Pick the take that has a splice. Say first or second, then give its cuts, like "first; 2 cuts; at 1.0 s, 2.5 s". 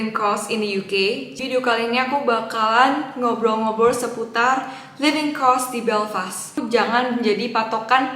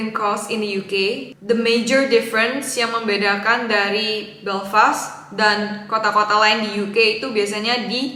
first; 2 cuts; at 1.3 s, 6.6 s